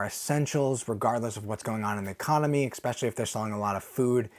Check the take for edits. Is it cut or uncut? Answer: uncut